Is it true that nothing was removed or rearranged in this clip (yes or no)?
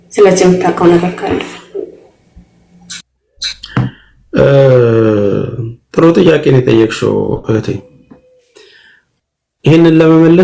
yes